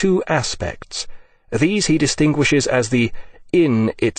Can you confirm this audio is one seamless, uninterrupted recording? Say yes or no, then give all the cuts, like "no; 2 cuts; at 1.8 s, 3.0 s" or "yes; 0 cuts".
no; 1 cut; at 0.9 s